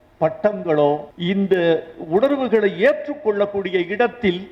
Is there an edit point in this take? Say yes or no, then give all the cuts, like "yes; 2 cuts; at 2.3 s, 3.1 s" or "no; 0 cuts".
yes; 1 cut; at 1.1 s